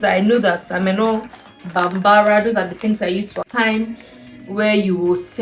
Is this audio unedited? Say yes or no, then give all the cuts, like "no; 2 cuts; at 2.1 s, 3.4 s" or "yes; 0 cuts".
no; 1 cut; at 3.5 s